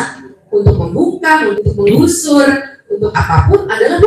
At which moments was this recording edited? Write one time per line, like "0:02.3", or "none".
0:01.5